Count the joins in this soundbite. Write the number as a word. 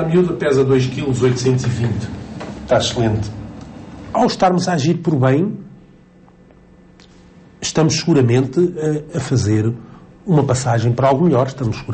one